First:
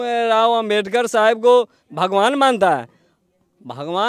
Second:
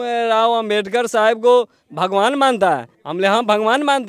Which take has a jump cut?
second; 1 cut; at 3.0 s

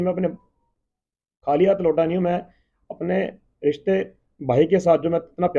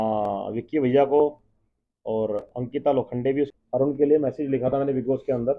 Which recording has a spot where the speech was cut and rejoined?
second; 1 cut; at 3.5 s

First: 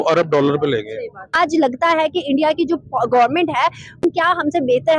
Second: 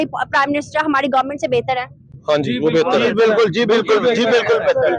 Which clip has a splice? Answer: first; 2 cuts; at 1.3 s, 4.0 s

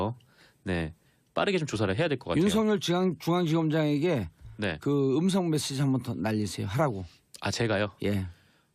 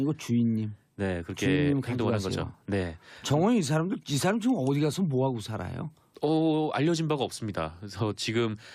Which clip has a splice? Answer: first; 1 cut; at 1.9 s

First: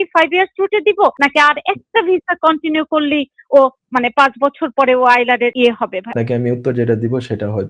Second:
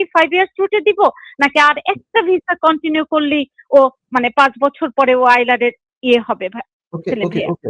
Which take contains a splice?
first; 2 cuts; at 1.2 s, 5.9 s

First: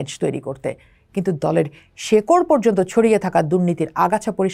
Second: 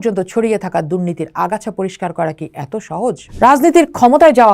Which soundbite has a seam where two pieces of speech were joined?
second; 1 cut; at 3.3 s

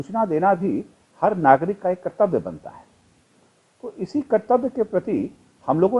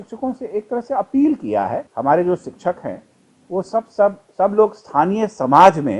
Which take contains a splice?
second; 1 cut; at 1.9 s

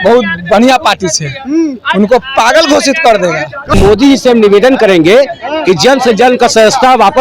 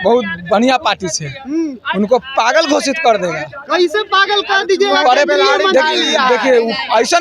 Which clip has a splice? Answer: first; 1 cut; at 3.7 s

